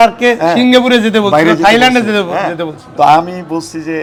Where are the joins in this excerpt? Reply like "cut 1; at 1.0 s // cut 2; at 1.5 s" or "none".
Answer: none